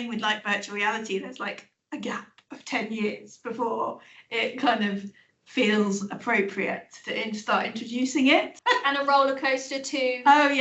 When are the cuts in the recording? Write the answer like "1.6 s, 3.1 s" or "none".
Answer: 8.5 s